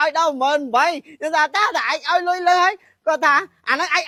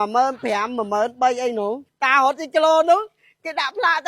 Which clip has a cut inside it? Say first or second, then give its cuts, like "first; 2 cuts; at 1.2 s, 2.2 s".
second; 1 cut; at 1.9 s